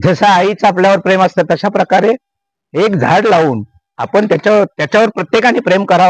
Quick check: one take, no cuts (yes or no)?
yes